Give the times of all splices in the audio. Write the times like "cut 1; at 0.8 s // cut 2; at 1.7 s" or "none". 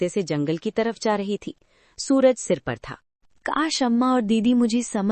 none